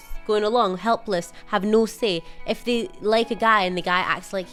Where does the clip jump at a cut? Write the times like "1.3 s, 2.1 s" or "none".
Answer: none